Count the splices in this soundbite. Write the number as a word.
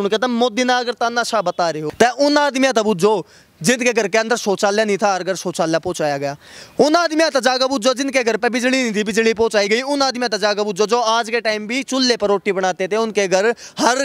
one